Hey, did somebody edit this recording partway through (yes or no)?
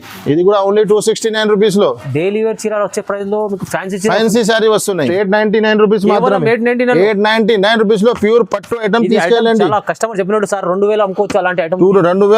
yes